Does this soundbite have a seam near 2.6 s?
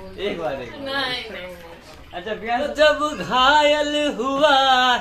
yes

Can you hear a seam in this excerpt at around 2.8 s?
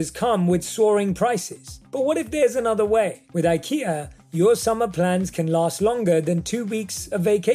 no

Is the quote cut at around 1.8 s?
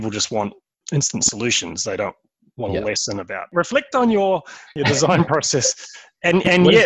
no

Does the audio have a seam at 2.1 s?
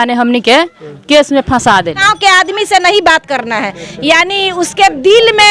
yes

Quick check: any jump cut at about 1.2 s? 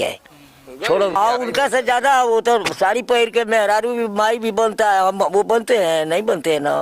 yes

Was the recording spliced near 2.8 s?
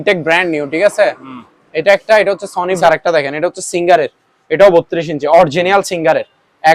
yes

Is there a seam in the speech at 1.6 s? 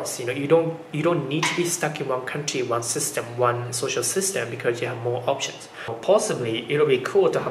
no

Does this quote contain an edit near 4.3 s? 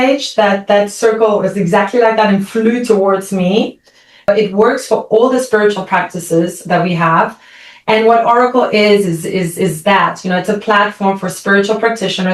yes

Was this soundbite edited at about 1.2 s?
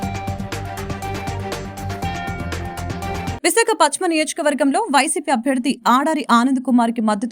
no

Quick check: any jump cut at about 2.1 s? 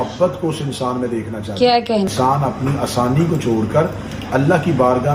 yes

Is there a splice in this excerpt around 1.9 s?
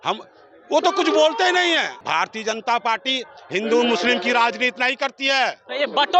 yes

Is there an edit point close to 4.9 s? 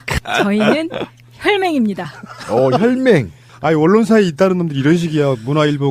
yes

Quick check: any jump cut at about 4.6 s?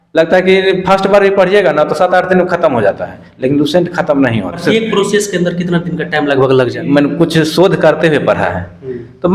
yes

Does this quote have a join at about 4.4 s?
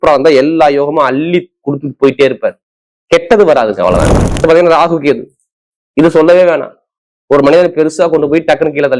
yes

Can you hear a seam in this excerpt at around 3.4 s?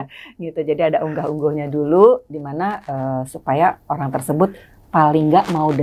no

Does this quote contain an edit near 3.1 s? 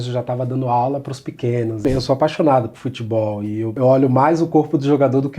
no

